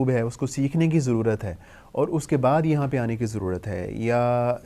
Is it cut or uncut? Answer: uncut